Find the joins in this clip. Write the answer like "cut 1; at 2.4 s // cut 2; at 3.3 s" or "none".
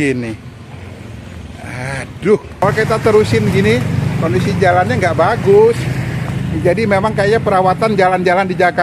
cut 1; at 2.6 s